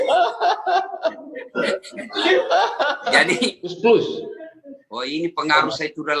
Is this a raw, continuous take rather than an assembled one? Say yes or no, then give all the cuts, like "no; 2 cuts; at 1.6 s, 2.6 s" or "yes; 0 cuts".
no; 1 cut; at 3.7 s